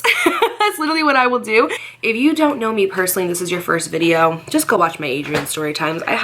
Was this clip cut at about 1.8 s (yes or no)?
yes